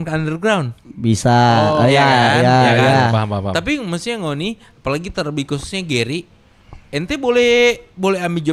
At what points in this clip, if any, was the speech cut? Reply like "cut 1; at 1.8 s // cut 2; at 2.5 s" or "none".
none